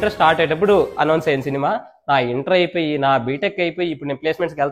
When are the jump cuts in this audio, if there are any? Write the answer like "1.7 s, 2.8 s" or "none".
none